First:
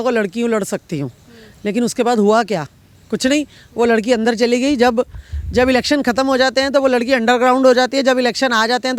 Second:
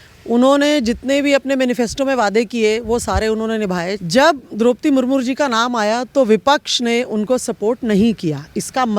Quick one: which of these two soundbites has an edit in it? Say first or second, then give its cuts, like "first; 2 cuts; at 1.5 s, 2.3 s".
second; 1 cut; at 4.0 s